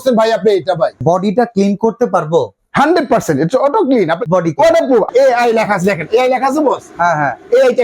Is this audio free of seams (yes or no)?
no